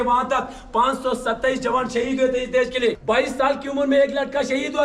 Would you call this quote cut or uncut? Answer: cut